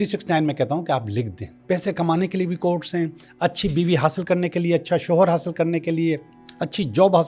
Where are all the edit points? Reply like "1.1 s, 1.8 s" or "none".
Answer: 1.5 s